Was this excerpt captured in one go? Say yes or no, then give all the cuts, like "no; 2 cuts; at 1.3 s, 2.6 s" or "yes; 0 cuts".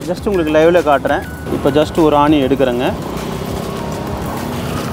no; 1 cut; at 1.4 s